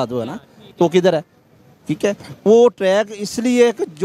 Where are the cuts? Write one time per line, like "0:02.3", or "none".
none

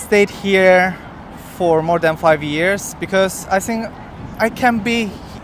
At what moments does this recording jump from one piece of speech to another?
none

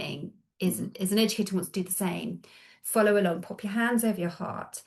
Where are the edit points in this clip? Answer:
none

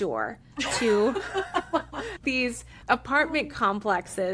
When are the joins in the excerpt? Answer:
0:02.3

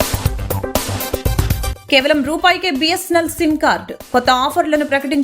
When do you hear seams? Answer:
0:01.8

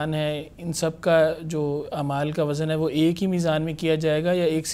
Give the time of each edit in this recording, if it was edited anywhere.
none

